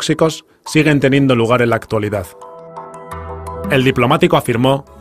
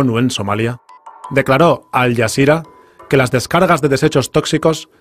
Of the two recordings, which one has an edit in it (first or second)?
second